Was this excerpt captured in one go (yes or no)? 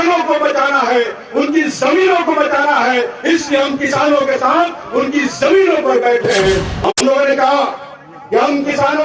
no